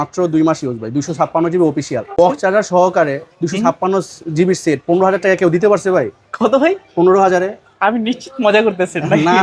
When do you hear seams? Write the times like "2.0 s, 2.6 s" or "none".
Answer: 2.1 s